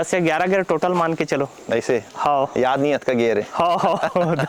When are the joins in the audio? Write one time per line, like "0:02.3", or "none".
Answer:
none